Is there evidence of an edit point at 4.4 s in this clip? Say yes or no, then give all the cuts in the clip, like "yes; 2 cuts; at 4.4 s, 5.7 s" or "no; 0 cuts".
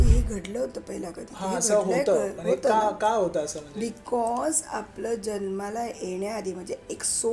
no; 0 cuts